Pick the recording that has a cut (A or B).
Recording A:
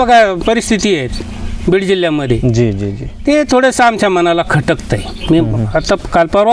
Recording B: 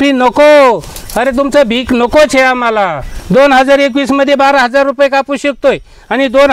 B